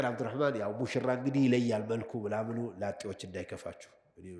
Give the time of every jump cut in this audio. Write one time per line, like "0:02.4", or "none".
none